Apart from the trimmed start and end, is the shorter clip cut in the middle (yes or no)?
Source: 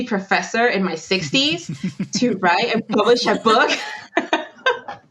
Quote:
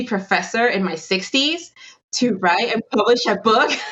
no